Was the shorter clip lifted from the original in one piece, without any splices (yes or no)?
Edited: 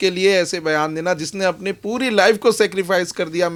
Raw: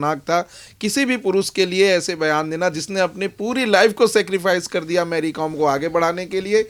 yes